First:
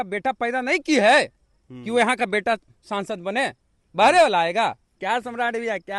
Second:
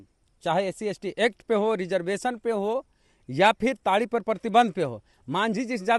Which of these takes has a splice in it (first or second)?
first